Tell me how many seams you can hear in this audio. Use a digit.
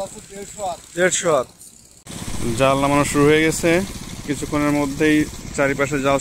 1